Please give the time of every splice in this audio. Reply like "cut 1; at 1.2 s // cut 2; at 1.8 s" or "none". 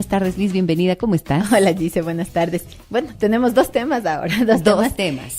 cut 1; at 1.7 s